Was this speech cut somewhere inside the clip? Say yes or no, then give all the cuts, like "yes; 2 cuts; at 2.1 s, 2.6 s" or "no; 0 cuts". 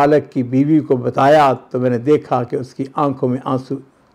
no; 0 cuts